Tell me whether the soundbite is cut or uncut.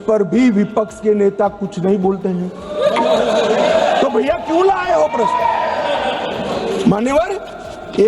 uncut